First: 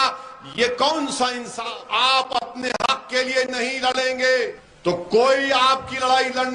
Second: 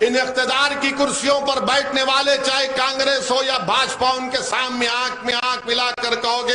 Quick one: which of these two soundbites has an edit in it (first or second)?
first